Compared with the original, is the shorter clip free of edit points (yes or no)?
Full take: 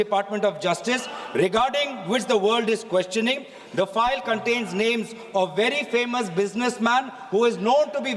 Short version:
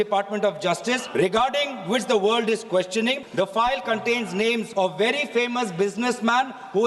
no